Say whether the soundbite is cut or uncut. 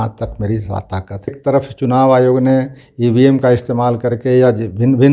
cut